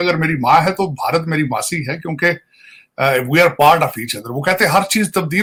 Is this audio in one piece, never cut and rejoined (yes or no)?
yes